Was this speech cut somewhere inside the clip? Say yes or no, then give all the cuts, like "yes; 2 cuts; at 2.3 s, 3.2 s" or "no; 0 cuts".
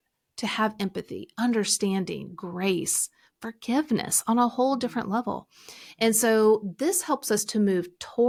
no; 0 cuts